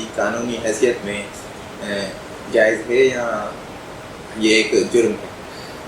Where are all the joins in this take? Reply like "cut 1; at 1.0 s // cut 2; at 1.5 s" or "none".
none